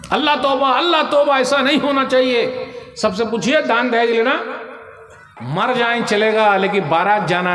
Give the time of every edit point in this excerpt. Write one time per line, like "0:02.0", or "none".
0:05.4

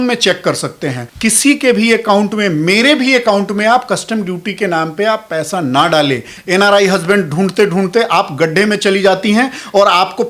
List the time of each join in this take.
0:01.1
0:06.3

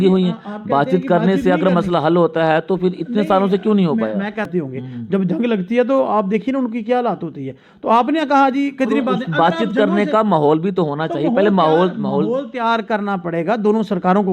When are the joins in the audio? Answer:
0:04.5

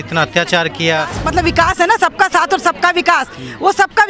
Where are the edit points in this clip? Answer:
0:01.2

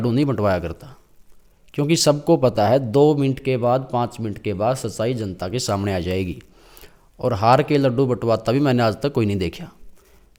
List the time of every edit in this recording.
none

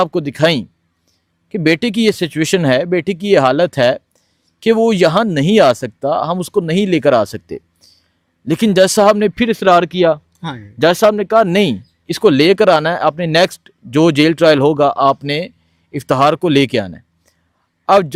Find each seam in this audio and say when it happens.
none

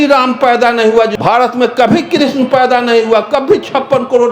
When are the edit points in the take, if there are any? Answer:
0:01.1

